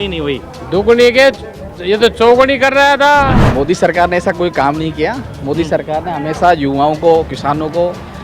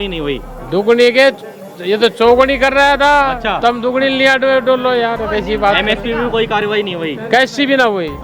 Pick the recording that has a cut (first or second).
first